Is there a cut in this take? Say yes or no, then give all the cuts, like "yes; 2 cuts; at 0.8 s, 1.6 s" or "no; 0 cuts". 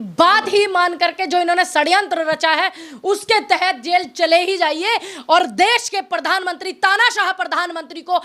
no; 0 cuts